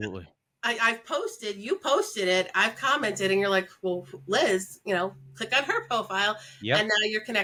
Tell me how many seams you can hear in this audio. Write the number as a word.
zero